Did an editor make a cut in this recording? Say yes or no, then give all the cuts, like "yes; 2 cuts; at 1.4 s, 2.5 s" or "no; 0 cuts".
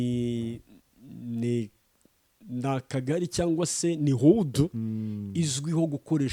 no; 0 cuts